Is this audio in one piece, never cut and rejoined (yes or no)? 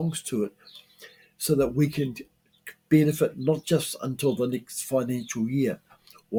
yes